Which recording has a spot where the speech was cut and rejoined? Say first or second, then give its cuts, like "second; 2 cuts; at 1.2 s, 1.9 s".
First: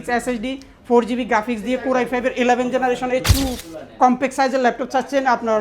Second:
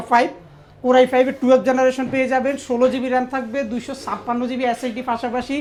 first; 1 cut; at 3.3 s